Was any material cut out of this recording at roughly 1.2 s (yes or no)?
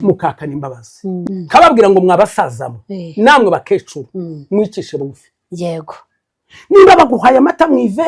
yes